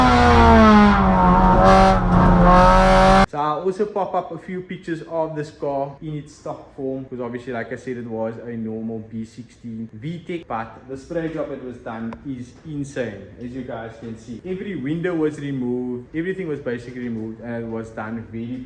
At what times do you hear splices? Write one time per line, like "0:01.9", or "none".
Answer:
0:03.2
0:06.0
0:07.1
0:10.4